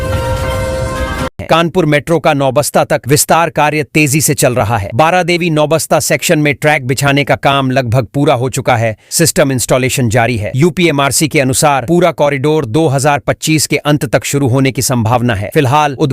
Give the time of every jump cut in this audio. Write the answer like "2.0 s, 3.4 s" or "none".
1.3 s